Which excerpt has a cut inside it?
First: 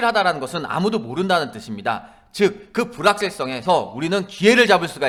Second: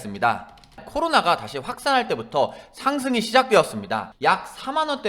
second; 2 cuts; at 0.8 s, 4.1 s

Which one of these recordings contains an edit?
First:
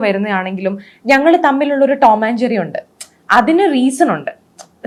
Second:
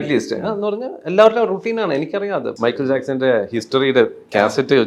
second; 1 cut; at 2.5 s

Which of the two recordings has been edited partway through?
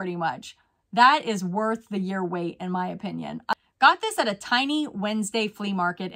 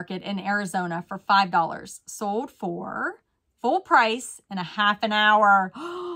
first; 1 cut; at 3.5 s

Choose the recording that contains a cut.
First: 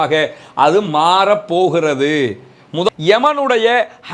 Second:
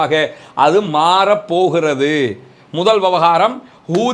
first; 1 cut; at 2.9 s

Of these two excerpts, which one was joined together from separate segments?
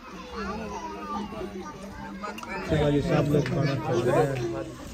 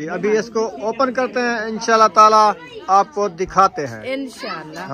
first; 1 cut; at 2.7 s

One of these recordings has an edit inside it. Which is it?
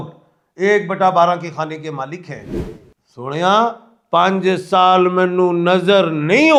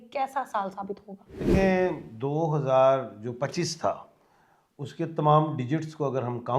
second; 1 cut; at 1.3 s

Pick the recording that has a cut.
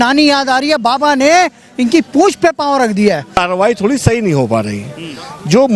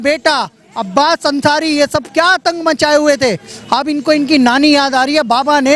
first; 1 cut; at 3.4 s

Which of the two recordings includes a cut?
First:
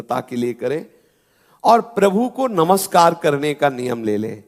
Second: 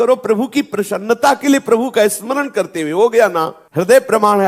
second; 1 cut; at 3.6 s

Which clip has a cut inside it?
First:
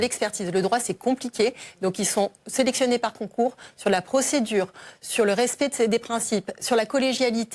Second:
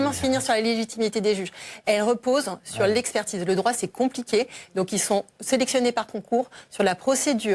second; 1 cut; at 1.4 s

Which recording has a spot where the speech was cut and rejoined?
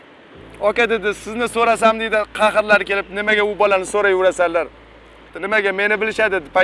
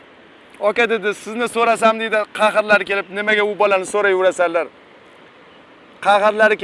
first; 1 cut; at 5.3 s

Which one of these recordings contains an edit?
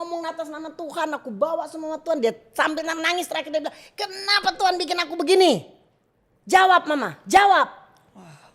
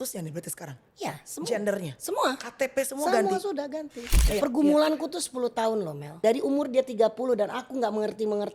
second; 2 cuts; at 4.1 s, 6.1 s

